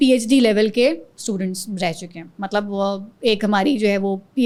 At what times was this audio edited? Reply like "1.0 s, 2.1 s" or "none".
none